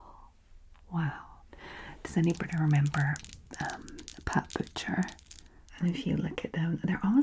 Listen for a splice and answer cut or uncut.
cut